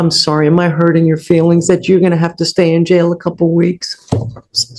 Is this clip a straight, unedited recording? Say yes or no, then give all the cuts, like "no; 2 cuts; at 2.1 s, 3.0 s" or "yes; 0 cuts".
yes; 0 cuts